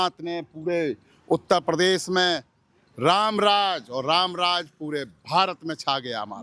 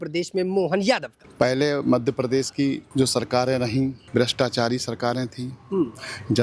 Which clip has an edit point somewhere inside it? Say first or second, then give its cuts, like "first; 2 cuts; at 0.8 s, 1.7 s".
second; 3 cuts; at 1.2 s, 2.8 s, 4.0 s